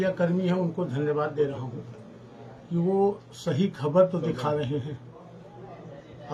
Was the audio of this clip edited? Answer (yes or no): no